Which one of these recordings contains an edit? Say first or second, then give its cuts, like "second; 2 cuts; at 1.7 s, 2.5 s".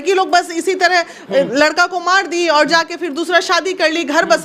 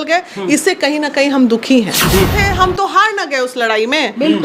second; 1 cut; at 2.3 s